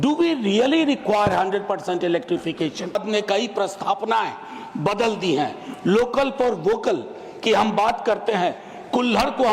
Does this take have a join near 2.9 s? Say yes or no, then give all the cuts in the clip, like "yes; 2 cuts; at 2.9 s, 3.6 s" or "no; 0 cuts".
yes; 1 cut; at 2.9 s